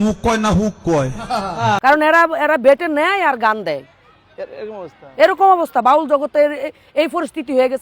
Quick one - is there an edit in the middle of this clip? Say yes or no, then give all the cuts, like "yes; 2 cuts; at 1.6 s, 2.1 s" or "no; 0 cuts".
yes; 1 cut; at 1.8 s